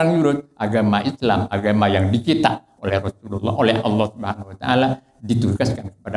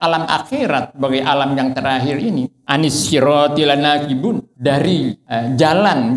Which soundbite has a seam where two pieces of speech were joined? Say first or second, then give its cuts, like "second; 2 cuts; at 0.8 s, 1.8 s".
second; 3 cuts; at 2.6 s, 4.5 s, 5.2 s